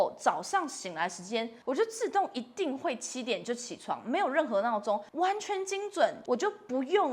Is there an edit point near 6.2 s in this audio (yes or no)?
yes